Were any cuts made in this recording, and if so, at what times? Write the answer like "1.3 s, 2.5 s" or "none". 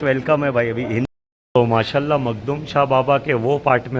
1.1 s

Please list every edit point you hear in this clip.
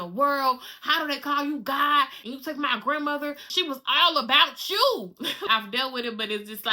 2.2 s, 3.4 s, 5.5 s

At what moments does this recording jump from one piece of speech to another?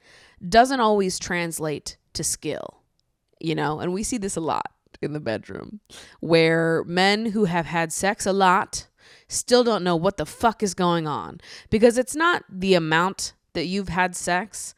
none

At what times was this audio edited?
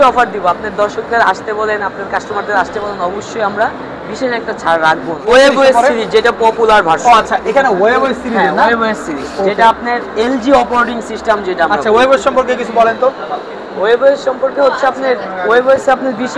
5.2 s

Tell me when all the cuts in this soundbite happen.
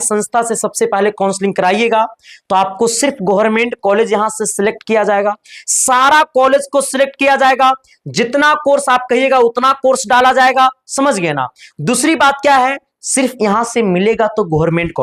none

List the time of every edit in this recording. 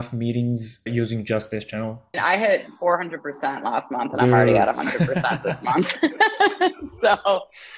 0.9 s, 2.2 s

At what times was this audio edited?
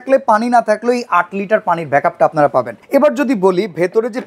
none

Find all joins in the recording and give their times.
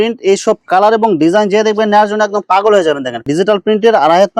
3.2 s

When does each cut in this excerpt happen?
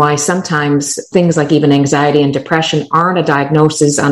1.0 s

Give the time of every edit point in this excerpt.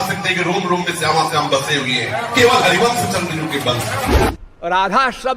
4.3 s

